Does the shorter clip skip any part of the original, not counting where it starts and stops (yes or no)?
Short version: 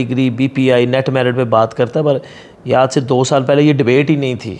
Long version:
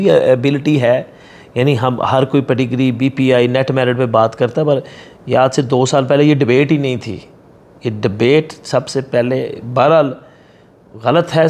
no